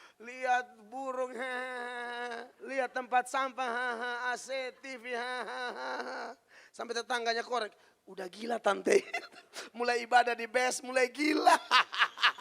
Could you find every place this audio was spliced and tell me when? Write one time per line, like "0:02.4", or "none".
0:02.5